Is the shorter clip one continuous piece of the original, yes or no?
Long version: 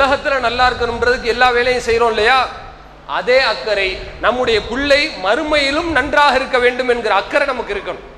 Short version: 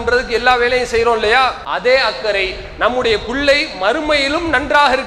no